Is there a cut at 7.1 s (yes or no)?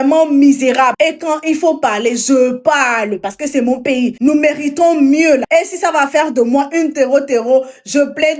no